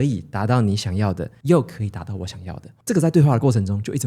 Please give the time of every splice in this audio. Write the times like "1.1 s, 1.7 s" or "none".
1.3 s, 2.7 s